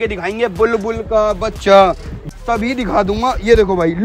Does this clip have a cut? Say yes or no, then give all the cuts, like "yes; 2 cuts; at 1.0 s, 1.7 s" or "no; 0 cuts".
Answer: yes; 1 cut; at 2.2 s